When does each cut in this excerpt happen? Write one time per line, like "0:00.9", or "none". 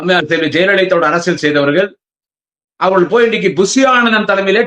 none